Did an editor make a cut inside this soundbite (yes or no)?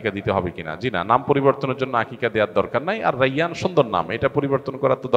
no